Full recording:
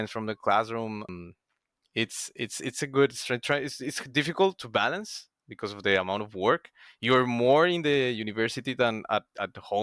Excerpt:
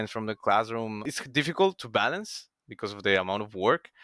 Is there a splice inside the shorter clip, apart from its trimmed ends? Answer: yes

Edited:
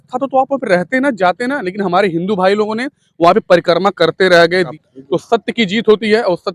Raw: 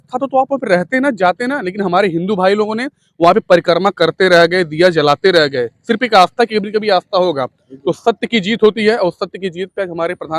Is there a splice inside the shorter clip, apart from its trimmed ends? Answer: yes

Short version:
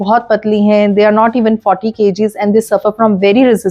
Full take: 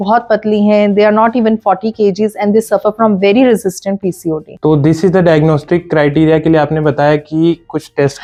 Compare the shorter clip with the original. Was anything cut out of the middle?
no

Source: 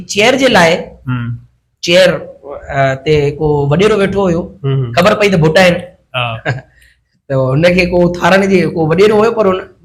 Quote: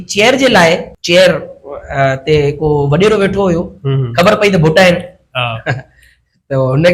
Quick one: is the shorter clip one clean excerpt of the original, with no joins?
no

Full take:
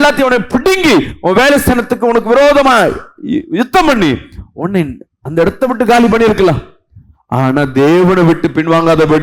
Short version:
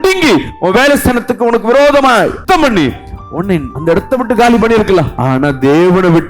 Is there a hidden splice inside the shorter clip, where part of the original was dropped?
yes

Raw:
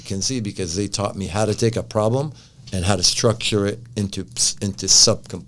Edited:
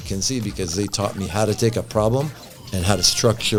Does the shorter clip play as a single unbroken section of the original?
yes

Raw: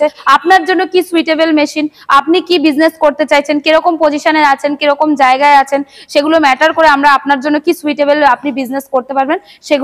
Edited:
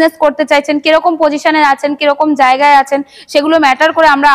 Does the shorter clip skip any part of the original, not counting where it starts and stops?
no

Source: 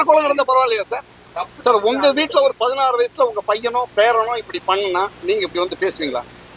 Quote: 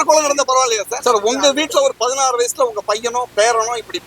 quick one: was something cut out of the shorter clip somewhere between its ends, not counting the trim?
yes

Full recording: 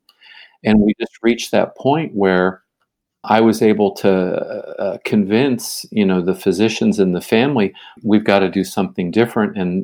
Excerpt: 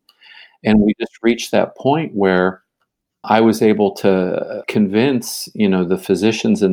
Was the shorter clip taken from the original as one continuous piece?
no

